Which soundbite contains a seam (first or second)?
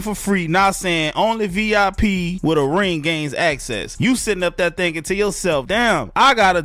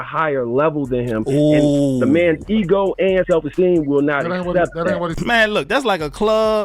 second